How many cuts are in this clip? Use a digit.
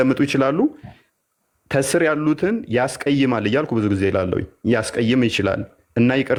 0